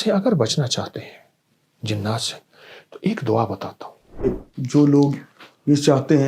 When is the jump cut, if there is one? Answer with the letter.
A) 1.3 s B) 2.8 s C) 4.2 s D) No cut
C